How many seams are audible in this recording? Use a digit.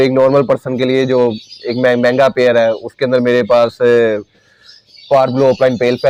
0